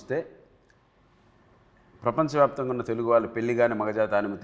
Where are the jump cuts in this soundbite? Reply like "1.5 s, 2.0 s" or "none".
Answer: none